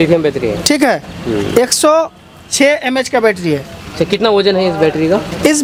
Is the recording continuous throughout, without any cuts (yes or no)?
yes